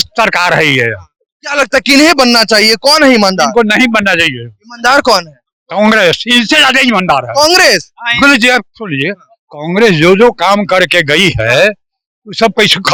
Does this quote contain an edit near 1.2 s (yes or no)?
no